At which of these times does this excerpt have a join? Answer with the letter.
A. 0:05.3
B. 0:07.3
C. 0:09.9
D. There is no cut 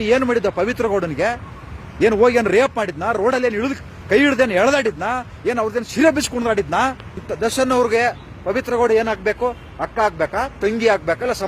B